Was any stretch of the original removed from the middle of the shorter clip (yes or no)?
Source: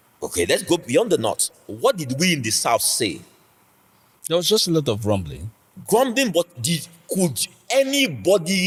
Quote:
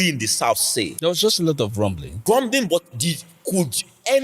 yes